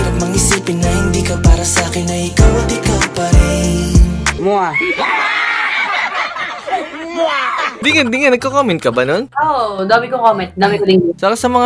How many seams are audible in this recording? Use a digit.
0